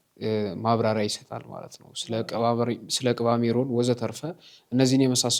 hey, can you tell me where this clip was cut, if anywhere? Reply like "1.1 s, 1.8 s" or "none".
none